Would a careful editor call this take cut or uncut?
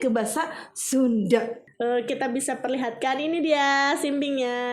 cut